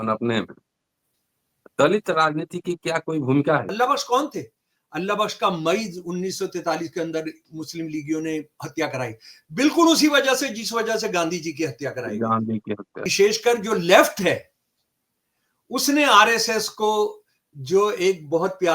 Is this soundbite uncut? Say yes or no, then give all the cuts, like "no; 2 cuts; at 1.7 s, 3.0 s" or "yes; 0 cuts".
no; 2 cuts; at 3.7 s, 13.1 s